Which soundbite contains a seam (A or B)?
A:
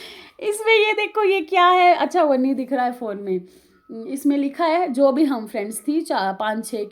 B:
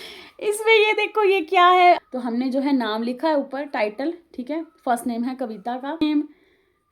B